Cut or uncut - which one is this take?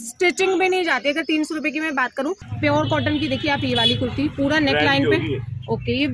cut